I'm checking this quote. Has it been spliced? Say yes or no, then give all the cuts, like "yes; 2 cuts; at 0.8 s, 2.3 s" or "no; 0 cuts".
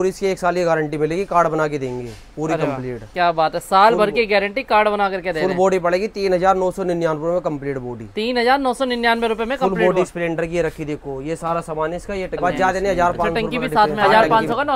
yes; 1 cut; at 12.4 s